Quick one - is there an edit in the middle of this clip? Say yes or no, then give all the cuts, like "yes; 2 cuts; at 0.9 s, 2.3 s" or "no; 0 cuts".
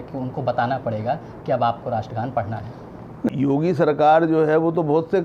yes; 1 cut; at 3.3 s